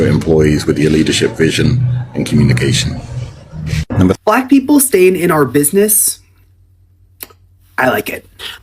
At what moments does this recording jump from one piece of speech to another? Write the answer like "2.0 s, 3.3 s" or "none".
4.2 s